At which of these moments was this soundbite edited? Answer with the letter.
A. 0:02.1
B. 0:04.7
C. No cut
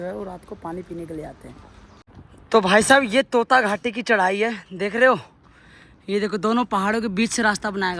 A